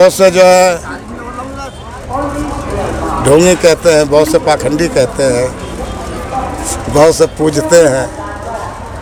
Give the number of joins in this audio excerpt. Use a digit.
0